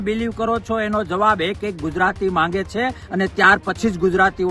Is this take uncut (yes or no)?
yes